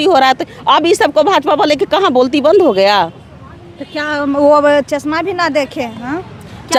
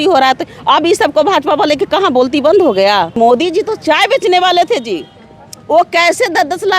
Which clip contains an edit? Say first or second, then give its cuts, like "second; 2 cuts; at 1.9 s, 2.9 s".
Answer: second; 1 cut; at 3.2 s